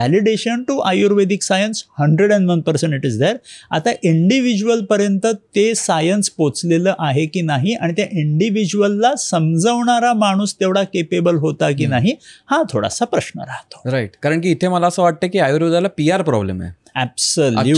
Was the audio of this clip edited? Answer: no; 0 cuts

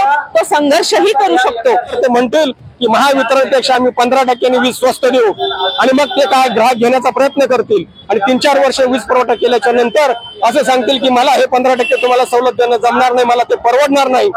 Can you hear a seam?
yes; 1 cut; at 1.9 s

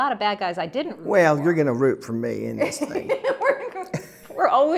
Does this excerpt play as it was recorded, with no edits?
yes; 0 cuts

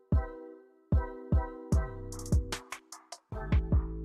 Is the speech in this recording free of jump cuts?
yes; 0 cuts

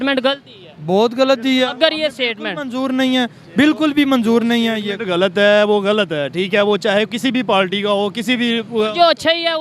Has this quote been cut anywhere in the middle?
no; 0 cuts

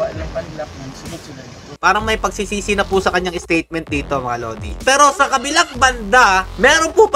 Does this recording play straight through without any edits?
no; 2 cuts; at 1.8 s, 4.8 s

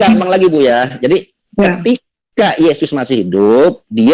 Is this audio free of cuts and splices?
yes; 0 cuts

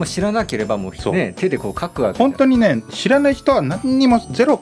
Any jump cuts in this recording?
yes; 1 cut; at 0.9 s

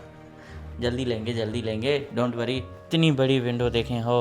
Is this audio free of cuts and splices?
no; 1 cut; at 2.7 s

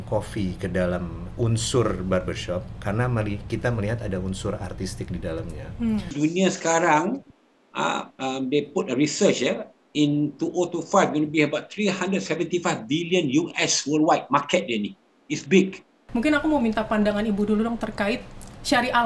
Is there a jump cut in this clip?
yes; 3 cuts; at 1.2 s, 6.1 s, 16.0 s

